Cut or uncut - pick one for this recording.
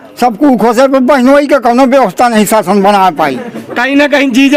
uncut